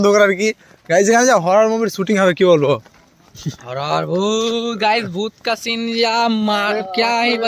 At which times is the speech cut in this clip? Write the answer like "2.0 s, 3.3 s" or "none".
none